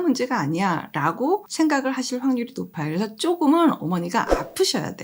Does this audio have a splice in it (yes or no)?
yes